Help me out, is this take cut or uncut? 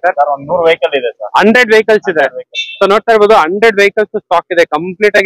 uncut